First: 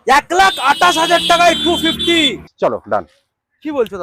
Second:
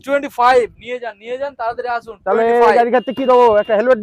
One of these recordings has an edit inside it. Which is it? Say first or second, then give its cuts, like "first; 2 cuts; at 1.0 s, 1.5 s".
first; 1 cut; at 2.4 s